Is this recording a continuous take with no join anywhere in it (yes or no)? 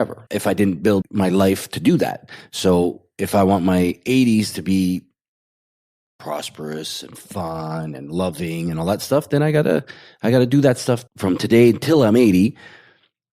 yes